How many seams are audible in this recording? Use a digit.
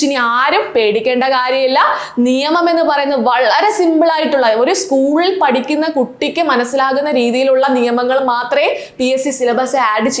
0